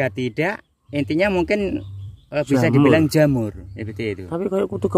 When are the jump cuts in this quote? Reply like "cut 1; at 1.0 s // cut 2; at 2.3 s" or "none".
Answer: none